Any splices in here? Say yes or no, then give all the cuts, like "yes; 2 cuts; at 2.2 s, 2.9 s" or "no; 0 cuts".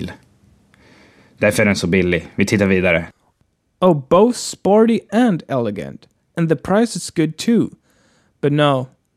no; 0 cuts